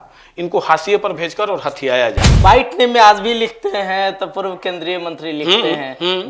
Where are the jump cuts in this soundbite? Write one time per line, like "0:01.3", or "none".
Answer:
0:02.2